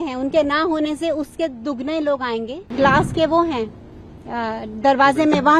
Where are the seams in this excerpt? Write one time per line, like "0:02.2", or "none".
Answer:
0:02.7

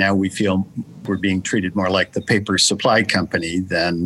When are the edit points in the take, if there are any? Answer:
0:01.0

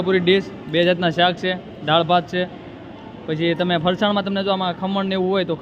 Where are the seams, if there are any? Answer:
none

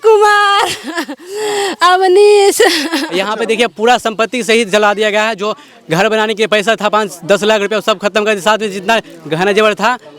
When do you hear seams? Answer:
0:03.1

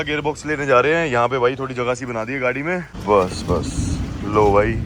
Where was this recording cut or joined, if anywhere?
0:02.9

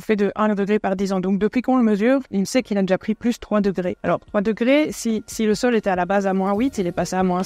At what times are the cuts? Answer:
0:04.0

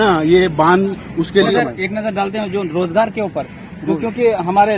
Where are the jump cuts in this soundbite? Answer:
0:01.5

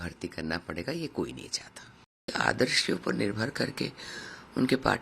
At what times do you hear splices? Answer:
0:02.3

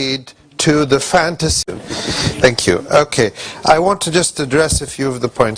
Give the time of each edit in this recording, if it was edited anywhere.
none

